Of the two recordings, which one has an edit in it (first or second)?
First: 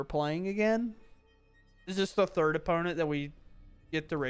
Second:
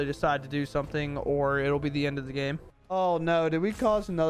second